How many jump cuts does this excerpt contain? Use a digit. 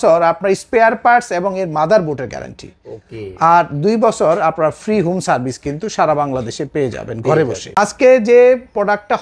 1